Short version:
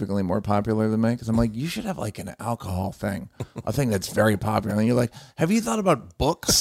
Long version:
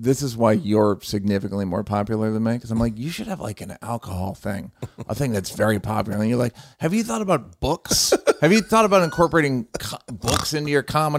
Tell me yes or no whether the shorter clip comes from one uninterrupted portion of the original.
yes